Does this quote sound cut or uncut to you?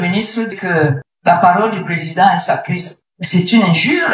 uncut